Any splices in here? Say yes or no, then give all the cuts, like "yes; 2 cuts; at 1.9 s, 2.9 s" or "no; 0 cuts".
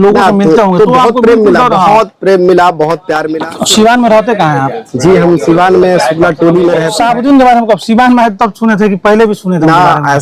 yes; 2 cuts; at 3.3 s, 6.9 s